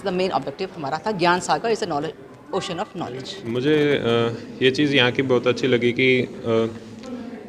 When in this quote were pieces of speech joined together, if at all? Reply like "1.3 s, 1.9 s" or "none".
3.3 s